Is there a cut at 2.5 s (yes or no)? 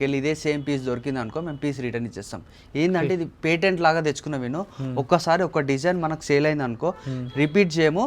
no